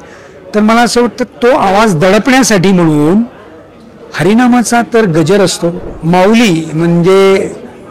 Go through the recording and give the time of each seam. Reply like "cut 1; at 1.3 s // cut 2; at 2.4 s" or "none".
cut 1; at 5.9 s